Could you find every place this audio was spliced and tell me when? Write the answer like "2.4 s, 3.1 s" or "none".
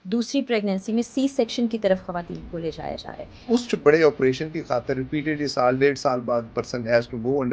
3.5 s

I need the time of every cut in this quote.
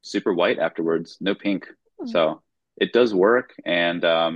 none

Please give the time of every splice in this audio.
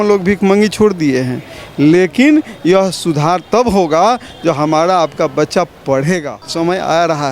6.4 s

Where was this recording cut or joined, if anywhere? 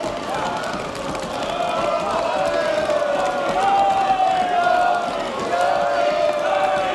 none

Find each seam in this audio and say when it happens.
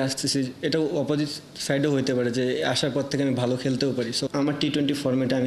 4.3 s

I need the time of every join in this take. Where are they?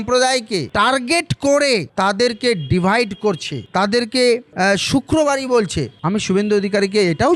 5.9 s

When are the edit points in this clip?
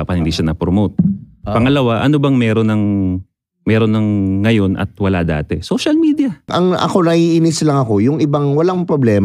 6.5 s

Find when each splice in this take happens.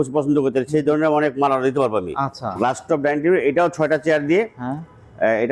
2.4 s

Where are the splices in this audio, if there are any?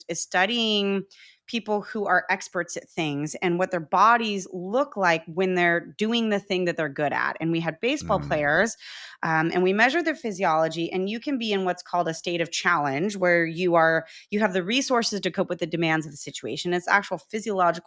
none

